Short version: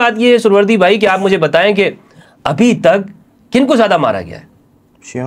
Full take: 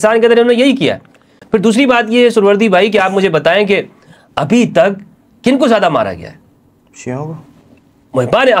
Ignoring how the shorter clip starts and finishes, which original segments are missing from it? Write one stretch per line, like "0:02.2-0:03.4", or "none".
none

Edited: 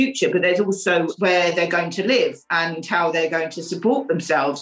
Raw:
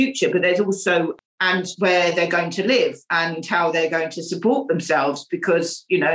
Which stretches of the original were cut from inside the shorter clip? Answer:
0:01.1-0:01.7

